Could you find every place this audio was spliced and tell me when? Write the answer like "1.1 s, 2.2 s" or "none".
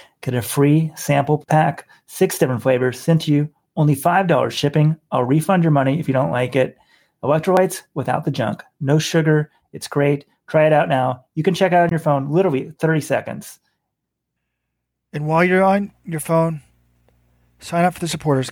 1.3 s

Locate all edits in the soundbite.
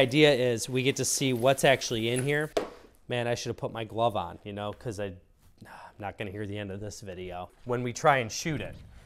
2.5 s, 7.5 s

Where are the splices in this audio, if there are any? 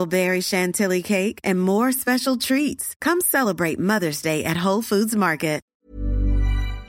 5.7 s

